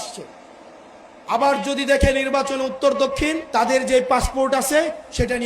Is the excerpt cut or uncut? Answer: cut